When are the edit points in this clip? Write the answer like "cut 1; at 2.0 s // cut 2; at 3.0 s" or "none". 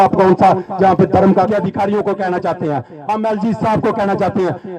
cut 1; at 1.5 s

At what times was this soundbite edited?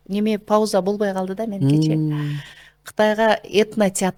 none

